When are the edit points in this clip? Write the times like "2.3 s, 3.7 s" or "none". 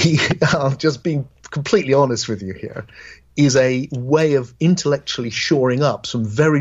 1.2 s